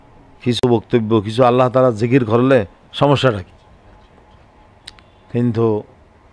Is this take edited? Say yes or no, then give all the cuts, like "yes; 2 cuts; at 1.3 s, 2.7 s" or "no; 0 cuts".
no; 0 cuts